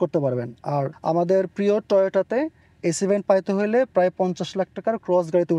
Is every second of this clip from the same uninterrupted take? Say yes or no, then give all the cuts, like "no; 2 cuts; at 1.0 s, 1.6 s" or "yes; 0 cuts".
no; 1 cut; at 0.9 s